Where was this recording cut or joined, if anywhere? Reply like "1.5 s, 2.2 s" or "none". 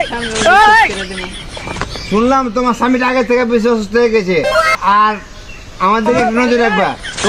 4.8 s